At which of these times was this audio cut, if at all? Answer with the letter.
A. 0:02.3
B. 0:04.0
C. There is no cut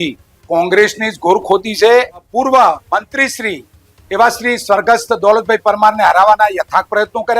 A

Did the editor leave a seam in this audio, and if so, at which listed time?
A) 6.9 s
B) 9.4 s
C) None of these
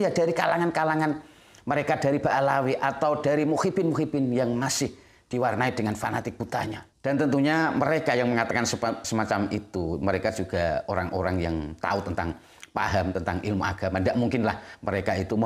A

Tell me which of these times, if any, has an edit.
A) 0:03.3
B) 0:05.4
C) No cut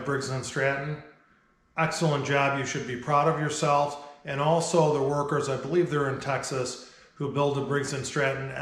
C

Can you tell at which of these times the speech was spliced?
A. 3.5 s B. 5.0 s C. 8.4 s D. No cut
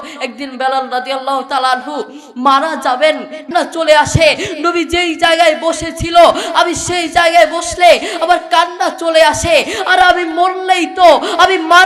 A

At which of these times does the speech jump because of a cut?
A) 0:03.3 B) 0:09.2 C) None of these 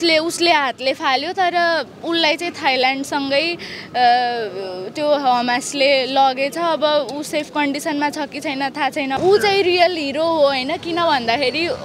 B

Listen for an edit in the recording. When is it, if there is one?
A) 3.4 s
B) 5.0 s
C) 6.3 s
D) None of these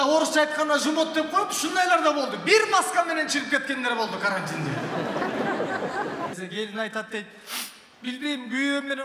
C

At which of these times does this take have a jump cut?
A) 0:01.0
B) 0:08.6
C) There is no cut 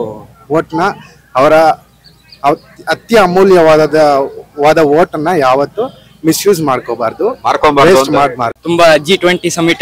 B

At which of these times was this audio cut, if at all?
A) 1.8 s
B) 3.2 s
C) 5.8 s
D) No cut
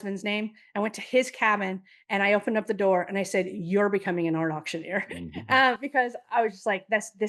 D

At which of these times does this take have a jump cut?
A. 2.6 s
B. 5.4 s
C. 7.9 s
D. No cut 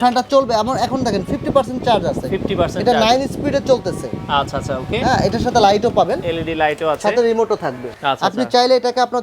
C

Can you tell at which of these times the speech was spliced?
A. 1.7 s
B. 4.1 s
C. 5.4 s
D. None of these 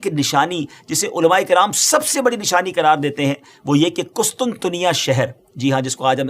D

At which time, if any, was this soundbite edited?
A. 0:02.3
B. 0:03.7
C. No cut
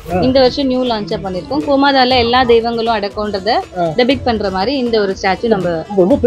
C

